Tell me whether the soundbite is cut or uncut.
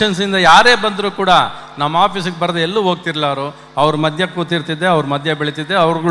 uncut